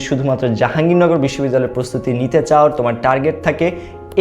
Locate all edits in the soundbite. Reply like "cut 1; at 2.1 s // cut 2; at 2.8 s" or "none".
none